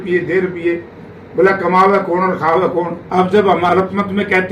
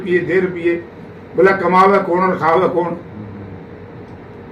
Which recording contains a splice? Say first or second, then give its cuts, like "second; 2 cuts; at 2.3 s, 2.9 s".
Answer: first; 1 cut; at 3.0 s